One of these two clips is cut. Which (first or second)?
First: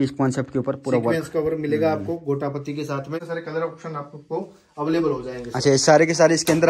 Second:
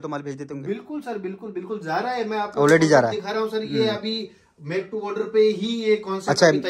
first